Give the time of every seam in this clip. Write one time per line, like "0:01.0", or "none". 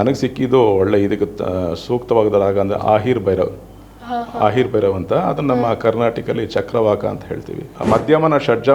0:07.6